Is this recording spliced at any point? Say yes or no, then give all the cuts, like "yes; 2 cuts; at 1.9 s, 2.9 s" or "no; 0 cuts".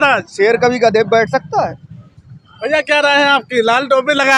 no; 0 cuts